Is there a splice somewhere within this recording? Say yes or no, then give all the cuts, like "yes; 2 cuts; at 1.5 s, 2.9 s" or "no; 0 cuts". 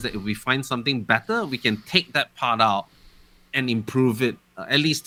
no; 0 cuts